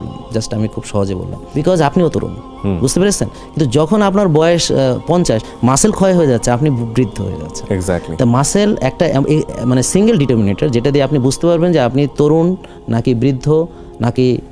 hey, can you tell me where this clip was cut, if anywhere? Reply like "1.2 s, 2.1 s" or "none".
none